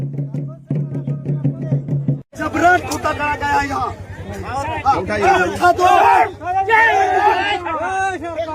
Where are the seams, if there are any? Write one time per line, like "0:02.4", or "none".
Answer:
0:01.6